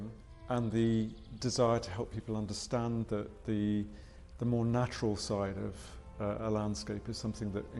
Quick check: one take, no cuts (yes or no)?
yes